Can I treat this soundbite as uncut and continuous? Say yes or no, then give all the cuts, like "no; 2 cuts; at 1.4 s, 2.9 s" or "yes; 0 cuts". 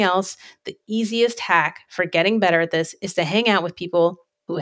yes; 0 cuts